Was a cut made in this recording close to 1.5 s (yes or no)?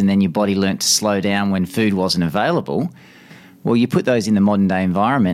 no